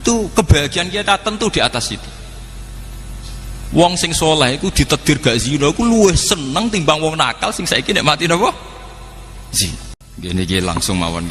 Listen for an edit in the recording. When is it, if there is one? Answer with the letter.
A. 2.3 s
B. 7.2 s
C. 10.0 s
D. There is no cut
C